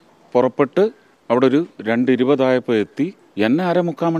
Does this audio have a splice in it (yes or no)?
yes